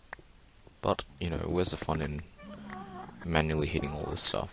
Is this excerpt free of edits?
no; 1 cut; at 1.1 s

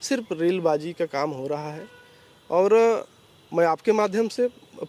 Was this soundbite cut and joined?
no; 0 cuts

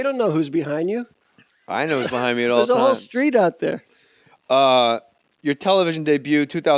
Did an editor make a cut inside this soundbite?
no; 0 cuts

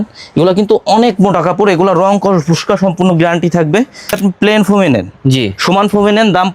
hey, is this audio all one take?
no; 1 cut; at 4.2 s

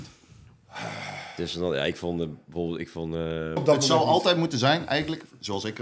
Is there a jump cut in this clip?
yes; 1 cut; at 3.6 s

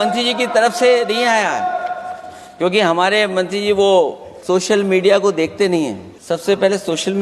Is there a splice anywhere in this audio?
yes; 2 cuts; at 4.3 s, 6.1 s

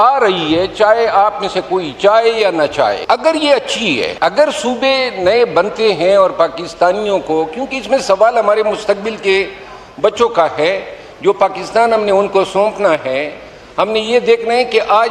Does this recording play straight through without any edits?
no; 2 cuts; at 3.0 s, 4.1 s

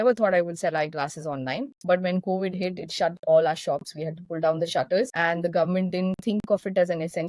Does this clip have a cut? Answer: no; 0 cuts

